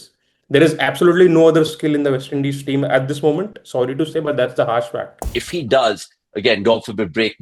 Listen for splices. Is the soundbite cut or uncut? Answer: cut